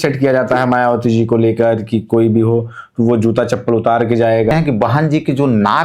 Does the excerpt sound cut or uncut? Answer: cut